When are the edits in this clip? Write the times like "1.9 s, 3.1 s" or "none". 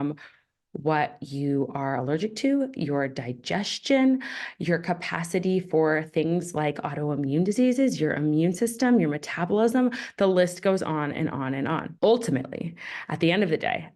11.9 s